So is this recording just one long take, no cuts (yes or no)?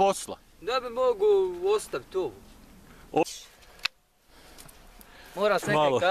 no